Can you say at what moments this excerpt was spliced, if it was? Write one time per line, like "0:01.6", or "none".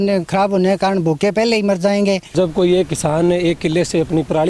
0:02.3